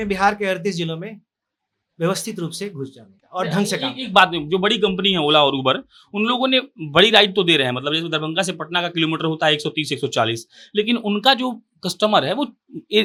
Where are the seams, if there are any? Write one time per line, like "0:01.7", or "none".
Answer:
none